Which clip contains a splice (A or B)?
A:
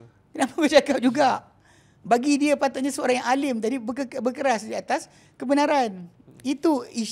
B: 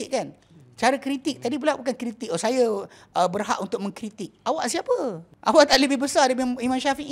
B